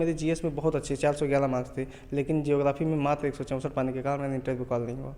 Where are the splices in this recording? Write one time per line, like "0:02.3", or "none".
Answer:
none